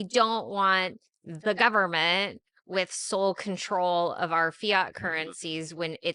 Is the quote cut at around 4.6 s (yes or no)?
no